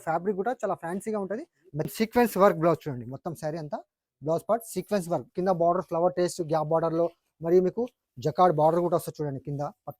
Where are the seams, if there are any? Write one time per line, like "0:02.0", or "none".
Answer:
0:01.9
0:05.3